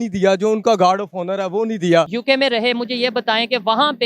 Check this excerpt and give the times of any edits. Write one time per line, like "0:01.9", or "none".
0:02.2